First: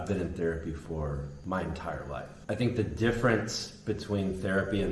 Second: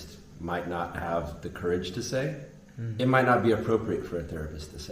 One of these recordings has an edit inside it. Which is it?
first; 2 cuts; at 1.3 s, 2.3 s

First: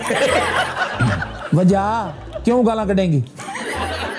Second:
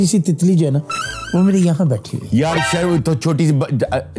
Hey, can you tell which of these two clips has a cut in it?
first; 1 cut; at 2.2 s

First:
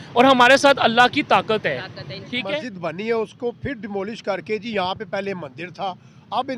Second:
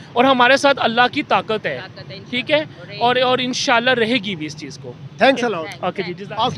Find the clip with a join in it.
first; 1 cut; at 2.7 s

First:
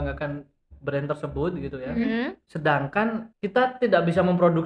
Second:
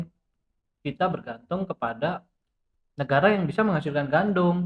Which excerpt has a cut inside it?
first; 2 cuts; at 2.4 s, 3.3 s

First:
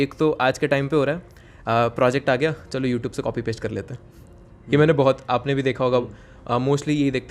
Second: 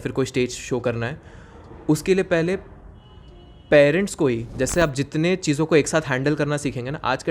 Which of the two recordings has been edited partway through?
second; 1 cut; at 4.5 s

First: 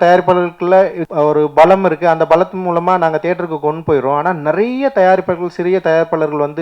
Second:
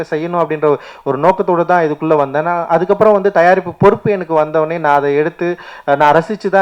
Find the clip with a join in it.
first; 1 cut; at 1.0 s

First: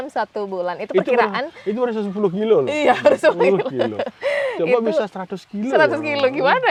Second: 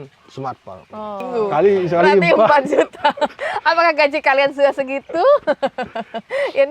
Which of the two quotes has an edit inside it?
second; 1 cut; at 1.2 s

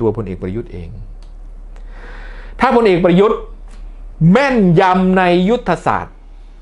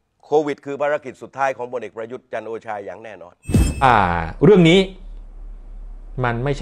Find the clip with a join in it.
second; 1 cut; at 3.8 s

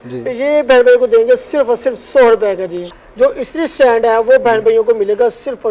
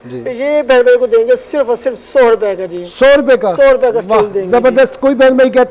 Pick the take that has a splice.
first; 1 cut; at 2.8 s

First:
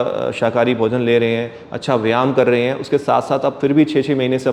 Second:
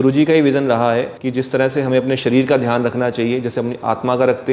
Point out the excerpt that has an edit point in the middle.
second; 1 cut; at 1.2 s

